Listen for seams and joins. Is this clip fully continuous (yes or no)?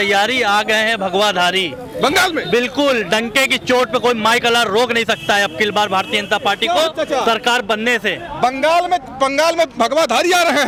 yes